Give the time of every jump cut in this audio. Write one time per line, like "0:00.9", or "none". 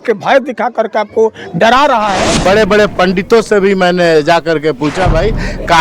0:02.4